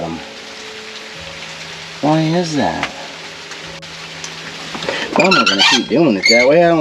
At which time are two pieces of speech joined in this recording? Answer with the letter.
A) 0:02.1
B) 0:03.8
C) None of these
B